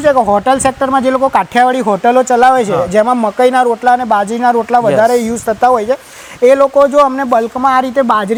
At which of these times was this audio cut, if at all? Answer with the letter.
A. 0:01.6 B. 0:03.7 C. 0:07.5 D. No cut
D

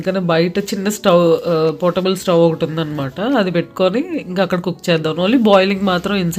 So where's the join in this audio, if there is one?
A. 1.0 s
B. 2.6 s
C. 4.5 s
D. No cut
D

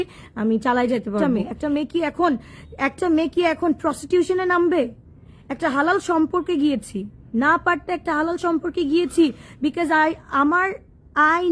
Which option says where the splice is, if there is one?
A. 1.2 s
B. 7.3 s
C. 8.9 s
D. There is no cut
A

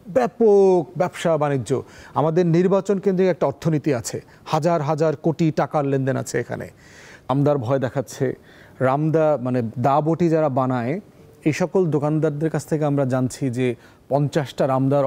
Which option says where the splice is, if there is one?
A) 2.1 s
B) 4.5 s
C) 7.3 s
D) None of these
C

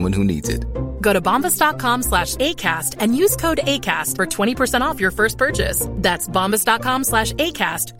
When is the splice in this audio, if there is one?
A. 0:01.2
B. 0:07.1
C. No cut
C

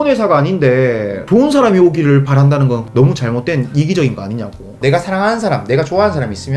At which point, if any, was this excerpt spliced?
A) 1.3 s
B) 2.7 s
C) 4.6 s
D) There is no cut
C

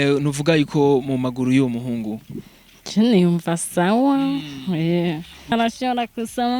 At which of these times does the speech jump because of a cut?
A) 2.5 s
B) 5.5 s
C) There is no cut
B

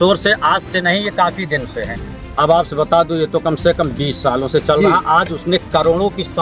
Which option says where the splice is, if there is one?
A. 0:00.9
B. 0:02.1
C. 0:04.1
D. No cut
B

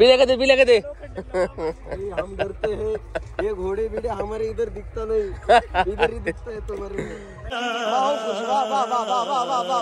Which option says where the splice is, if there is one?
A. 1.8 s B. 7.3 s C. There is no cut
C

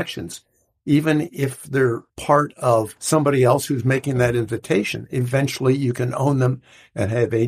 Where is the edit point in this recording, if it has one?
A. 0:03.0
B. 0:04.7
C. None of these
A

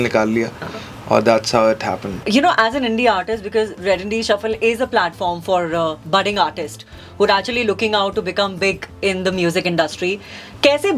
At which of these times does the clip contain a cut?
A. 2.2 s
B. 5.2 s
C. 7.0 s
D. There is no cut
A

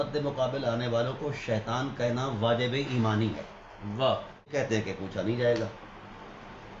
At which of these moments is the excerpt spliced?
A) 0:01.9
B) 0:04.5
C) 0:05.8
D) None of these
B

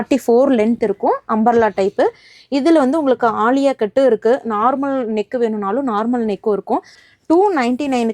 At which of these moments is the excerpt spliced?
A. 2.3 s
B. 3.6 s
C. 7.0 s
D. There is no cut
C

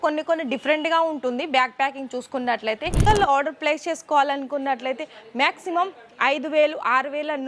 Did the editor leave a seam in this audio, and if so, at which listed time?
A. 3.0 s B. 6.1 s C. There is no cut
A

